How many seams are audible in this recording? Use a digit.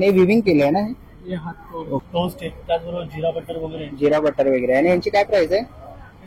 1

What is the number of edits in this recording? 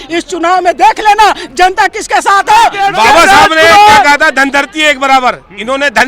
1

